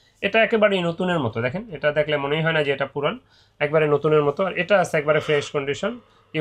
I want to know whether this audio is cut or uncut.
uncut